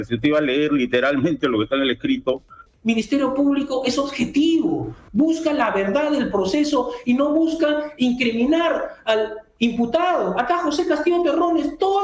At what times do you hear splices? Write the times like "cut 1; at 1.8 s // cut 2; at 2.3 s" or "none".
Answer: cut 1; at 2.6 s